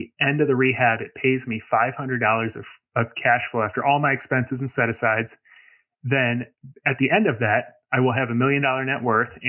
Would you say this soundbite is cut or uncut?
uncut